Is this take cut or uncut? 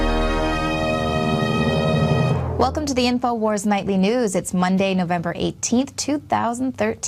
uncut